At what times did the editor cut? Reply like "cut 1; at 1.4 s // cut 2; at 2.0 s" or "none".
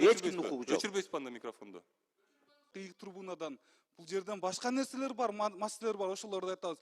cut 1; at 2.7 s